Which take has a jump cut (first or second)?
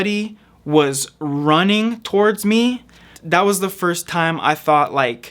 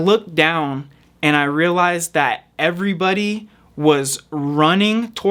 first